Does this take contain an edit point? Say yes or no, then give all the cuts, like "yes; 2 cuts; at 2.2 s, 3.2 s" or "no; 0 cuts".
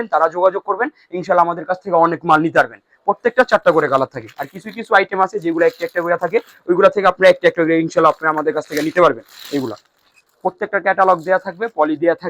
no; 0 cuts